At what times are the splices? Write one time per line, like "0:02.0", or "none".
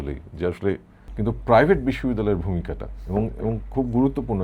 0:01.0